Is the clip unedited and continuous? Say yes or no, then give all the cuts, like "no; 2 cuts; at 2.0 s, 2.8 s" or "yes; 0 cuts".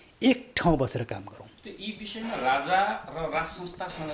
yes; 0 cuts